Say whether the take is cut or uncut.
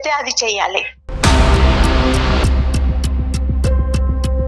cut